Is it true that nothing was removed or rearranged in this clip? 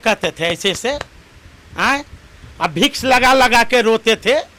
yes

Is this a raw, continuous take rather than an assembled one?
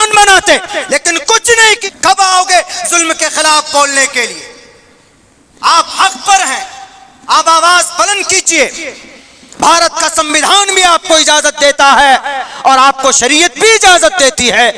no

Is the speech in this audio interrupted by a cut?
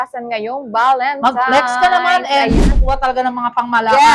yes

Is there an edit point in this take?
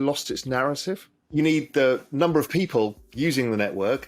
yes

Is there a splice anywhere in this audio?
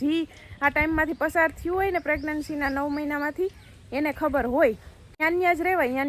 yes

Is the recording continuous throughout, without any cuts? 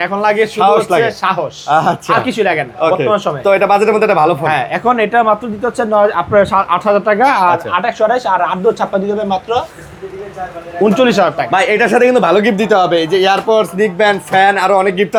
yes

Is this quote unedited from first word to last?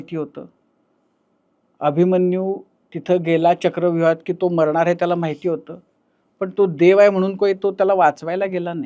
yes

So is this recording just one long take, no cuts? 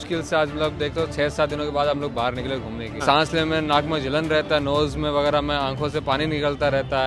no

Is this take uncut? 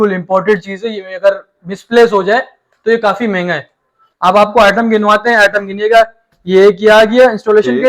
no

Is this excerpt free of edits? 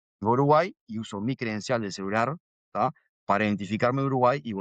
yes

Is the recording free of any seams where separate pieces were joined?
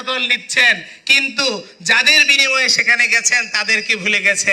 yes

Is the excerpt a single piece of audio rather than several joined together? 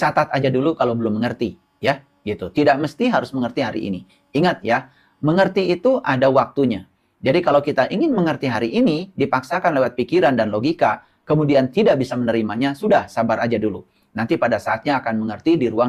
yes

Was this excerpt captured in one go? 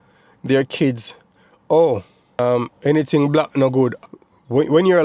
no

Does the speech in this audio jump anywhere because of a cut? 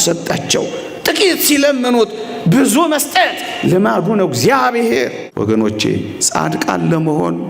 yes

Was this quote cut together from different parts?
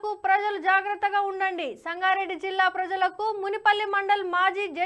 yes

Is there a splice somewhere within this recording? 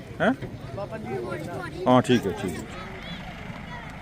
yes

